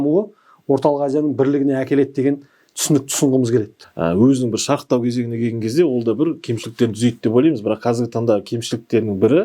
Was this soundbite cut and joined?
yes; 1 cut; at 3.8 s

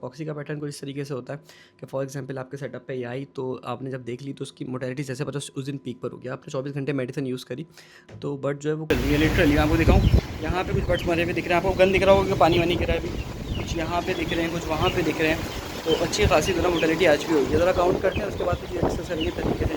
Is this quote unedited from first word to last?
no; 1 cut; at 8.9 s

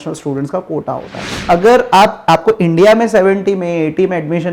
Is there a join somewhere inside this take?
yes; 1 cut; at 1.3 s

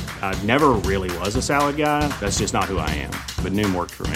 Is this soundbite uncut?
yes; 0 cuts

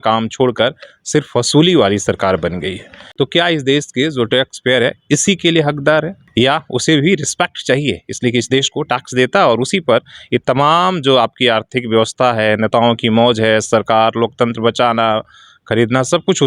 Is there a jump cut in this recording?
yes; 2 cuts; at 3.0 s, 6.2 s

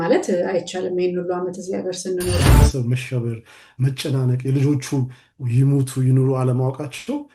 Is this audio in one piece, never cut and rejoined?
no; 1 cut; at 2.4 s

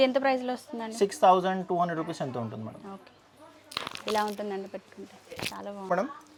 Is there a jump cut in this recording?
no; 0 cuts

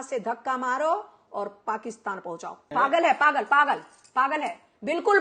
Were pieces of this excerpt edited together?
yes; 1 cut; at 2.7 s

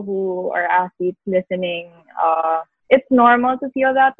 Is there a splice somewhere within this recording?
yes; 1 cut; at 2.7 s

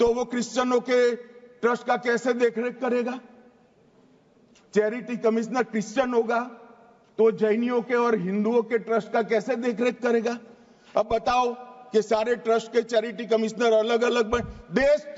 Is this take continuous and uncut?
yes; 0 cuts

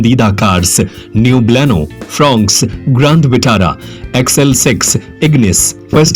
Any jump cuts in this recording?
no; 0 cuts

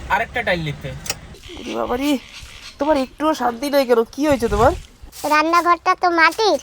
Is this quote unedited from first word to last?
no; 2 cuts; at 1.3 s, 4.9 s

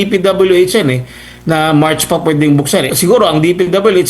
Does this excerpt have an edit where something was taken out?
yes; 1 cut; at 2.9 s

